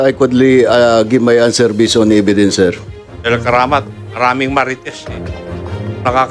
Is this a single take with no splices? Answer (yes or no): no